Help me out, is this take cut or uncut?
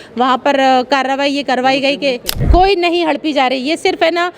cut